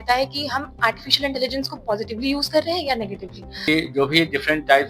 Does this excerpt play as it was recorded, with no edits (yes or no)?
no